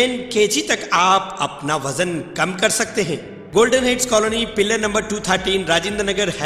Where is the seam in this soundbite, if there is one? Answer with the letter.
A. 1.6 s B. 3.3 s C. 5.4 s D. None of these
B